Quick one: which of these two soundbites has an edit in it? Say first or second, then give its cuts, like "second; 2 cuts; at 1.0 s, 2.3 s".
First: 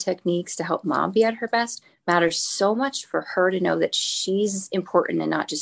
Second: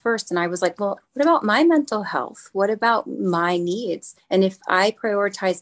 second; 2 cuts; at 1.0 s, 4.1 s